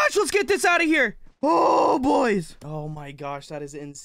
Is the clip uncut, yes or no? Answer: no